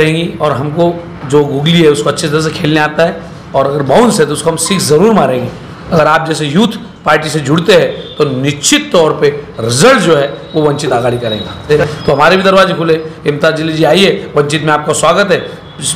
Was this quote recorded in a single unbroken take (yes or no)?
no